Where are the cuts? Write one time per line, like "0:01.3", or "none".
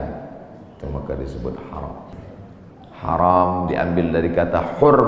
0:02.2